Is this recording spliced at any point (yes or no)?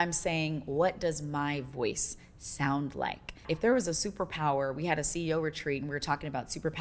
yes